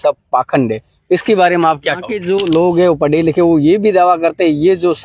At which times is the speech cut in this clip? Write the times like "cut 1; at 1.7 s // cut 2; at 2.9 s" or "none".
cut 1; at 2.1 s